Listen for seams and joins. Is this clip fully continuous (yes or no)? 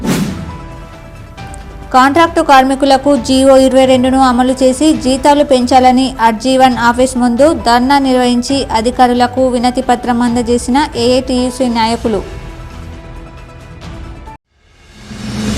no